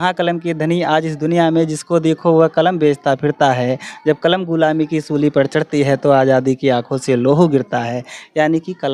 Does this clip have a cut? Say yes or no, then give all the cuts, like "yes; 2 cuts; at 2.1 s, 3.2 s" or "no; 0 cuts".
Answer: no; 0 cuts